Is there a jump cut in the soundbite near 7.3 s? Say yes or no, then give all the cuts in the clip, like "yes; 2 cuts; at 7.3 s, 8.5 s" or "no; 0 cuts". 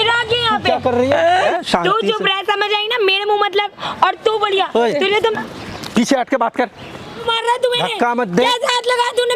yes; 2 cuts; at 1.4 s, 7.3 s